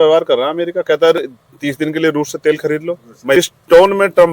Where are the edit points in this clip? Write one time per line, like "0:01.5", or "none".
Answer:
0:03.3